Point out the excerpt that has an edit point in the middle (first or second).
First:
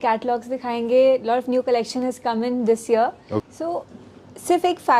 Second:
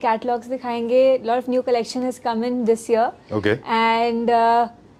first